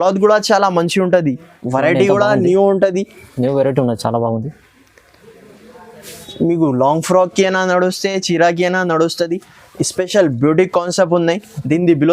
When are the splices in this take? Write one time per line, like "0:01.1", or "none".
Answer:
0:01.5